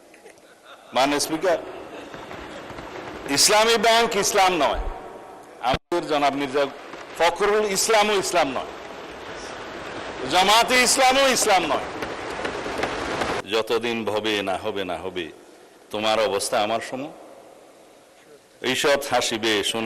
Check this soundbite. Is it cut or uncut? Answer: cut